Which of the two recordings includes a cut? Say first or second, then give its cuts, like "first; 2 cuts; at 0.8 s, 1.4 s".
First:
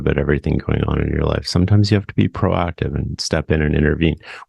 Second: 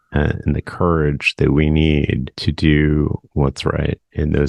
second; 1 cut; at 2.3 s